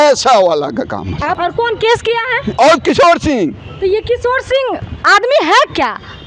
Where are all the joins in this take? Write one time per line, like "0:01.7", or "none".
0:01.3